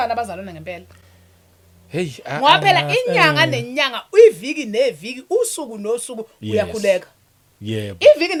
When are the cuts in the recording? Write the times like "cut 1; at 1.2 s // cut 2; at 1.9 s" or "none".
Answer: none